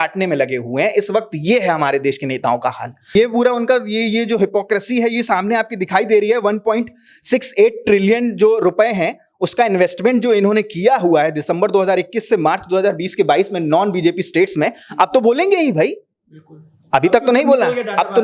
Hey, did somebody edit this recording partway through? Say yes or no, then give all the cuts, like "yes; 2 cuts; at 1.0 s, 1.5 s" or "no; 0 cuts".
yes; 1 cut; at 3.1 s